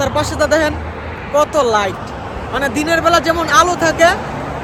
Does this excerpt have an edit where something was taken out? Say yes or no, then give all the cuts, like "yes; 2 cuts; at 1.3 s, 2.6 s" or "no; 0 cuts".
no; 0 cuts